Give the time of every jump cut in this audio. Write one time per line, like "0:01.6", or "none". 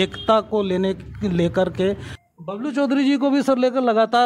0:02.1

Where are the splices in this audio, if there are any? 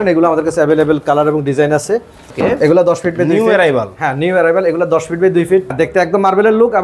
0:02.2
0:05.7

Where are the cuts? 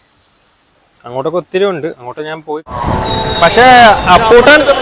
0:02.8

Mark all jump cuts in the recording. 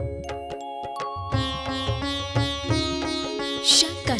0:01.4

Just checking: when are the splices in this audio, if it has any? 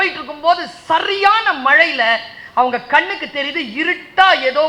none

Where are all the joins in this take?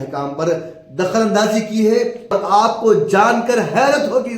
0:02.3

